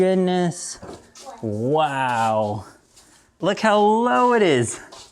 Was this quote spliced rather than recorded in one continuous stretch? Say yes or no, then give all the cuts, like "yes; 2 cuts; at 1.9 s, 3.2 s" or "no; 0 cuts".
yes; 1 cut; at 3.3 s